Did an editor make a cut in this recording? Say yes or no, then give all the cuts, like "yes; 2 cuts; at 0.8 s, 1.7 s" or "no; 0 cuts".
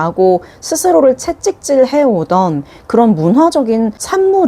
no; 0 cuts